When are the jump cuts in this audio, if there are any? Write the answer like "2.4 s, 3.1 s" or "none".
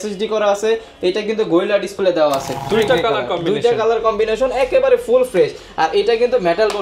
2.6 s